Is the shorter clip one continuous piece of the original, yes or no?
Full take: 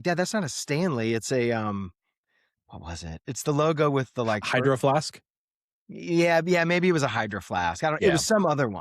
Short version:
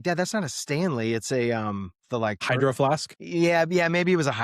no